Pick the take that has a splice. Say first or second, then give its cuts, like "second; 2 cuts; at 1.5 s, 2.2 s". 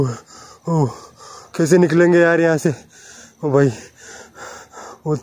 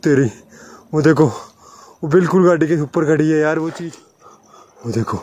second; 1 cut; at 3.8 s